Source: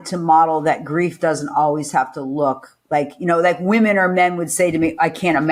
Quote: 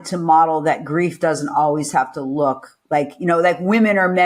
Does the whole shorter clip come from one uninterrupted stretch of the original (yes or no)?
yes